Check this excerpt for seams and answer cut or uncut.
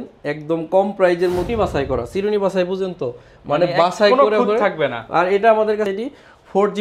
cut